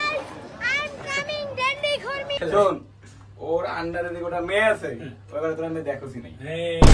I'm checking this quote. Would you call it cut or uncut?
cut